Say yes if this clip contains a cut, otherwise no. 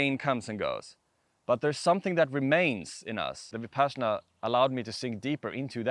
yes